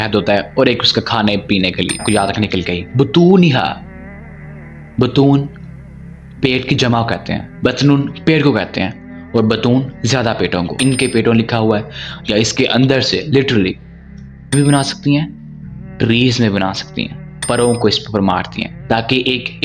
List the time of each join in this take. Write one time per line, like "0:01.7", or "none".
0:02.0
0:10.8
0:14.5
0:17.4